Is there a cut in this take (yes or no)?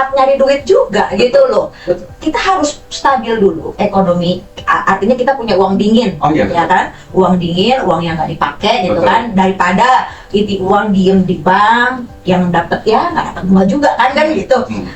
no